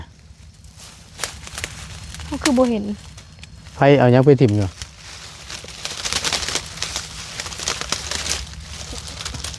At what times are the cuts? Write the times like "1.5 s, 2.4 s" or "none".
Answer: none

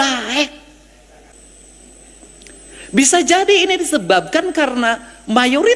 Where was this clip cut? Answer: 1.3 s

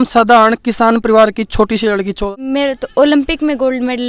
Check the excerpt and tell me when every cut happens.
2.2 s

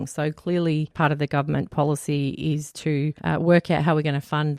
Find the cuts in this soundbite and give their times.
0.9 s, 3.2 s

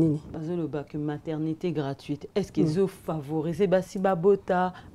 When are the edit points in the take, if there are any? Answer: none

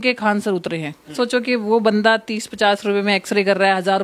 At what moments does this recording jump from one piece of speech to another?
1.1 s

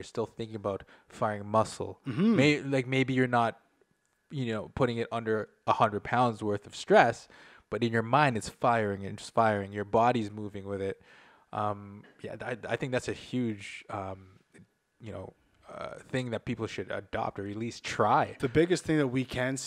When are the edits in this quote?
18.3 s

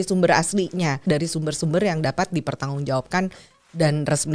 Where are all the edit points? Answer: 1.0 s

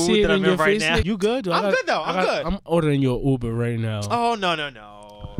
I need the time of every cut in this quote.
1.0 s

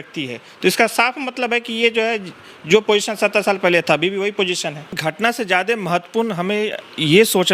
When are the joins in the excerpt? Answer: 5.0 s

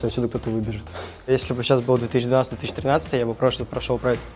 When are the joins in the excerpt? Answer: 1.3 s

